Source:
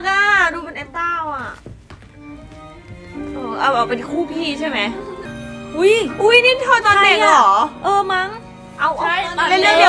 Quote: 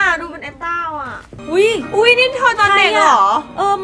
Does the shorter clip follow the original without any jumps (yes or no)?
no